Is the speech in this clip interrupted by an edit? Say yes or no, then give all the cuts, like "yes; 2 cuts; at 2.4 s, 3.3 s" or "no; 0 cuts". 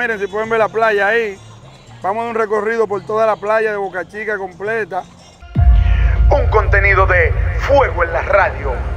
yes; 1 cut; at 5.4 s